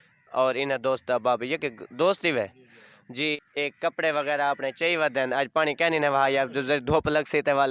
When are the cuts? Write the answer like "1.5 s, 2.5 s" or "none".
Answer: 3.4 s